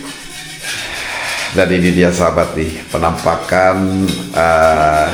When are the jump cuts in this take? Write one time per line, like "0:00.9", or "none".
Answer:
none

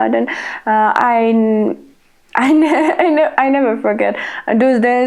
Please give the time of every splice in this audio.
none

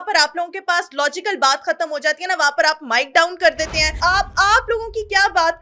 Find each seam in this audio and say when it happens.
0:03.9

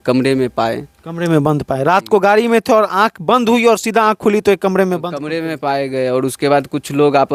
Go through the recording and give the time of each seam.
none

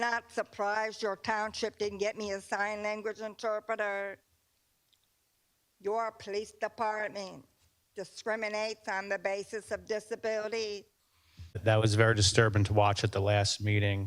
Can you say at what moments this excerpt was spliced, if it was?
0:11.6

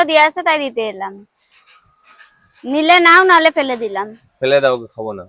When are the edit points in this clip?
none

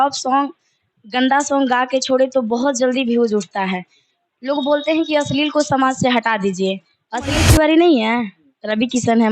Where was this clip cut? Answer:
0:07.4

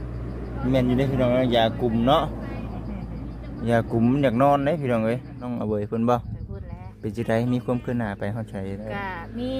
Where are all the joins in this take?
0:05.4

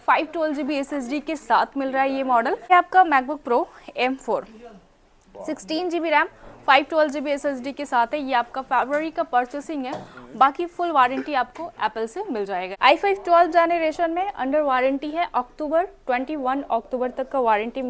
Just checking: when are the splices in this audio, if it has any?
0:02.7
0:12.7

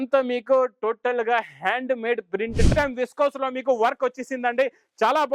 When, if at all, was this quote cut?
0:02.7

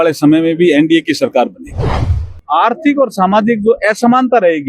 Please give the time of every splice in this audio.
0:02.2

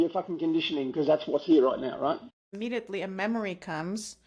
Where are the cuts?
0:02.3

